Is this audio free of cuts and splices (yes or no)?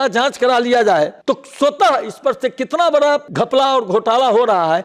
no